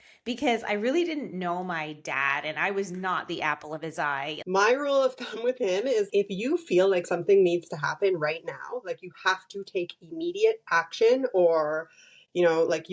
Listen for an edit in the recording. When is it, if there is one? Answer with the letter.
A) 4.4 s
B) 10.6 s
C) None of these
A